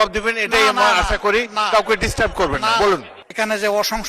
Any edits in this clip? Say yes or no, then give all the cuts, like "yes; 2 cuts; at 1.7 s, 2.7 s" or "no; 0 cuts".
yes; 1 cut; at 3.2 s